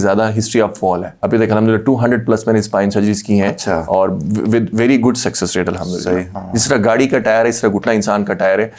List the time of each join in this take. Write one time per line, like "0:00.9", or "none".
0:01.1
0:06.3